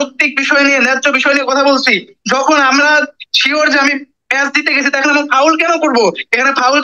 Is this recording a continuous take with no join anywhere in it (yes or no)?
yes